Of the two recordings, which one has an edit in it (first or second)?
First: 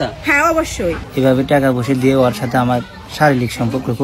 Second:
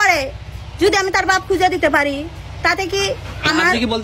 first